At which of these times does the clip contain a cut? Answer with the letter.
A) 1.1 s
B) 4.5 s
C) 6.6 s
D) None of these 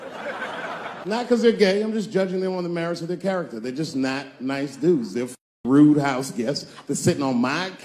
A